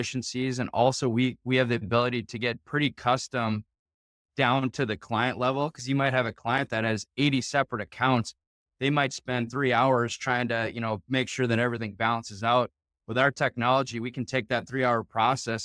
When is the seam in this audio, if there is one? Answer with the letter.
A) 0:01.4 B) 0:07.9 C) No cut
C